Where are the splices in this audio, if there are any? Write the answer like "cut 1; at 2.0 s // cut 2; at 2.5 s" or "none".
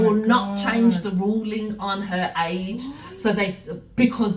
none